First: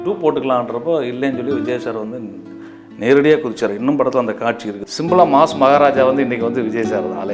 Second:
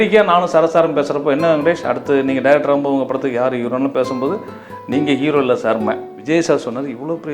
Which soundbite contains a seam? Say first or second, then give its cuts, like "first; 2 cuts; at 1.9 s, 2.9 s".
second; 1 cut; at 6.1 s